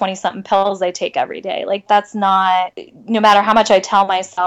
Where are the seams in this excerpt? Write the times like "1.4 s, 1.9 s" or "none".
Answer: none